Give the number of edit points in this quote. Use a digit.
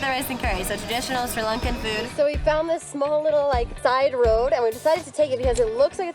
2